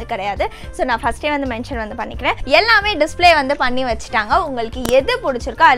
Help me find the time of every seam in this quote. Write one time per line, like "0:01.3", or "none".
0:02.4